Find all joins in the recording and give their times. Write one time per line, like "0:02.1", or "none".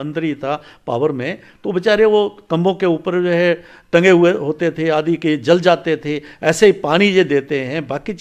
none